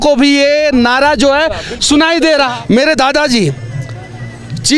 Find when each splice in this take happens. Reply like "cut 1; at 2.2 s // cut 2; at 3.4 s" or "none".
cut 1; at 2.5 s